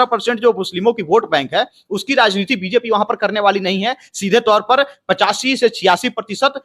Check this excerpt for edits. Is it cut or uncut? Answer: uncut